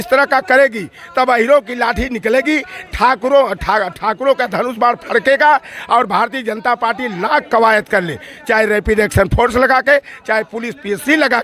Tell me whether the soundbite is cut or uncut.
uncut